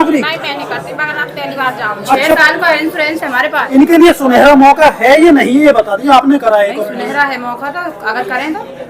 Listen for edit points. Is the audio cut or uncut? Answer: cut